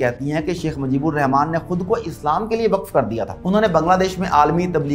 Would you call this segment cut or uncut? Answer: cut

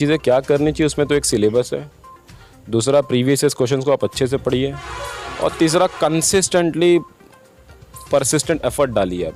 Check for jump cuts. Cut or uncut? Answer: uncut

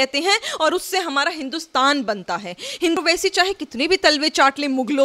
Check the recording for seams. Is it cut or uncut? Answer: cut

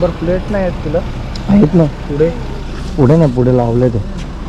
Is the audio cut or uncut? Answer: uncut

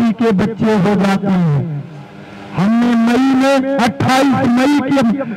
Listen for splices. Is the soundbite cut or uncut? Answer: uncut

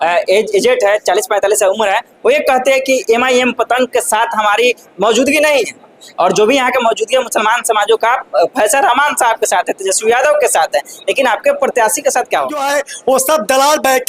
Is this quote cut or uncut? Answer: cut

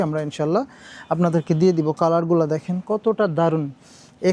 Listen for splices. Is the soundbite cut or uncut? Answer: uncut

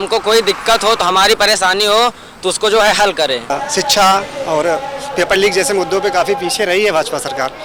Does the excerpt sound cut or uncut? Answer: cut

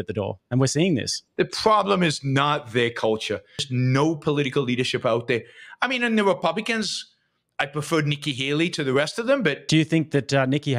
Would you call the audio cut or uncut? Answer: cut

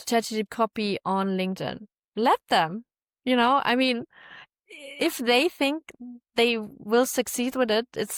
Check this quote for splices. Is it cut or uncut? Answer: uncut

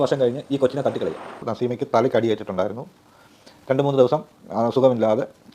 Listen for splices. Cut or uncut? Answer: cut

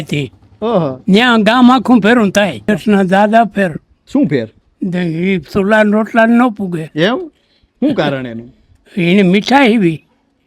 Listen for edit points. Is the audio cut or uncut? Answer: cut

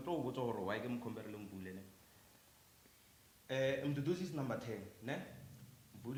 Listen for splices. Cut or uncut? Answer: uncut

